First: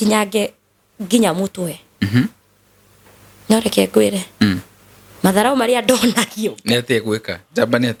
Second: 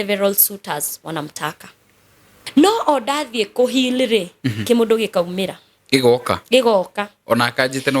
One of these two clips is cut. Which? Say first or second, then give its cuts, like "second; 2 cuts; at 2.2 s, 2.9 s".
second; 1 cut; at 2.4 s